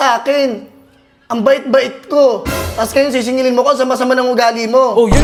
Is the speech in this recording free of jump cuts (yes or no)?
yes